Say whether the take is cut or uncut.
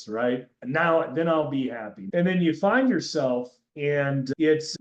cut